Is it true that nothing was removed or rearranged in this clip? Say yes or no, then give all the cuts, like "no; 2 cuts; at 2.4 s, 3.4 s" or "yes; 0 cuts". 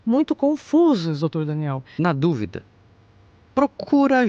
no; 1 cut; at 1.8 s